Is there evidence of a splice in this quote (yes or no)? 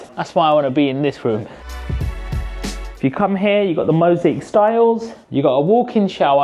no